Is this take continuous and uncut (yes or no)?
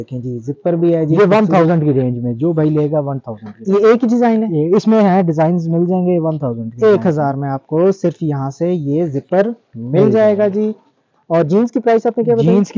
yes